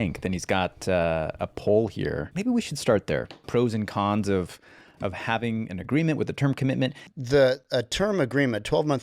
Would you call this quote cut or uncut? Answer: cut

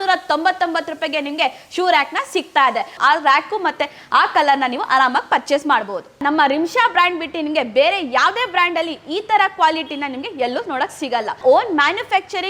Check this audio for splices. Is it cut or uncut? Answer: cut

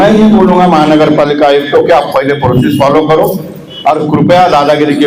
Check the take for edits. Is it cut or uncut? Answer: uncut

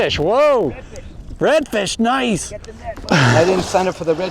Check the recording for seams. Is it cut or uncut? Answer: cut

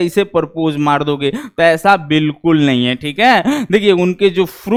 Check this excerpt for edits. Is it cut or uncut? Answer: uncut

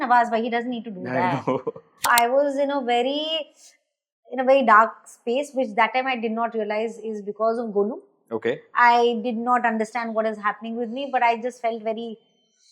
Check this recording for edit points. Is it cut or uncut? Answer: cut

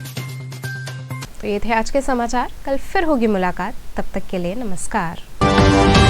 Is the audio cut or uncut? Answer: uncut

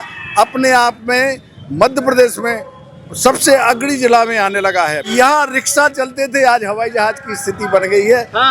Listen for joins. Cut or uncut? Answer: cut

